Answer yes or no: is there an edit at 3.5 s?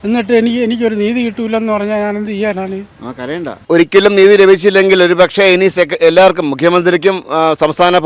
yes